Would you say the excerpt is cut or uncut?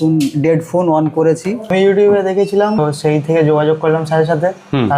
cut